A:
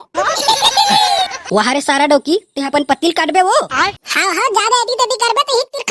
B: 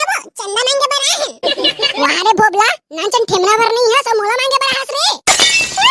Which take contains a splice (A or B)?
A